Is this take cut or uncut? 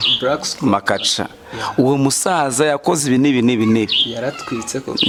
uncut